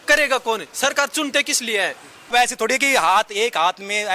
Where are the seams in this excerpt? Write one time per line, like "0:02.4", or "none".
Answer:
none